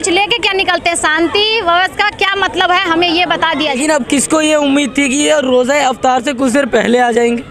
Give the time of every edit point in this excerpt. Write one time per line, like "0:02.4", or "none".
0:03.8